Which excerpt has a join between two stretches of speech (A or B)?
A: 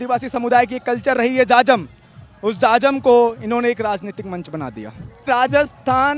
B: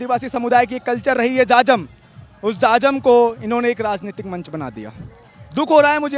A